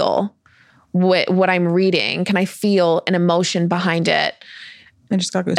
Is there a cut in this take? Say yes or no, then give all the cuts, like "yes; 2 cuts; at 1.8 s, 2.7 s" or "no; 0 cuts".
no; 0 cuts